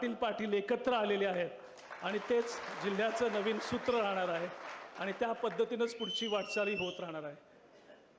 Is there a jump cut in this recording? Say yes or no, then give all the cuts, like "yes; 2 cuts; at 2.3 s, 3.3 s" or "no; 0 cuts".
no; 0 cuts